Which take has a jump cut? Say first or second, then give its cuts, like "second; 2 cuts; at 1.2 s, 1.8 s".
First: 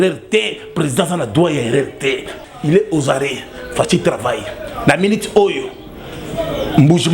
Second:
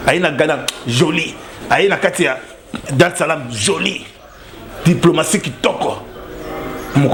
first; 1 cut; at 2.3 s